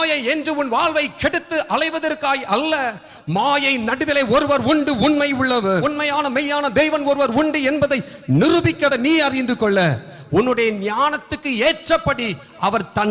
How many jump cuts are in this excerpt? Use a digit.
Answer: 2